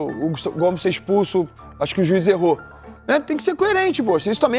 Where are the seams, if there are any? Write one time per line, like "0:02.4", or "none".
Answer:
none